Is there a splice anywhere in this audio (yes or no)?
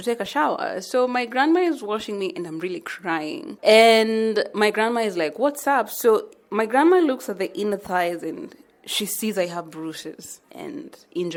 no